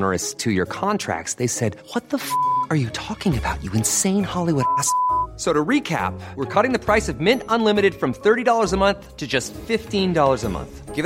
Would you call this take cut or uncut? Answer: uncut